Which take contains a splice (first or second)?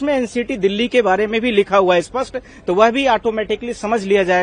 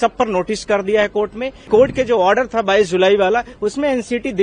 second